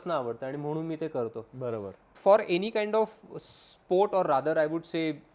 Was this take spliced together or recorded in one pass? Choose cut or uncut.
cut